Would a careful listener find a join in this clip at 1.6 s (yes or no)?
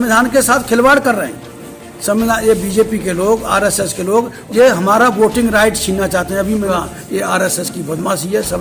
no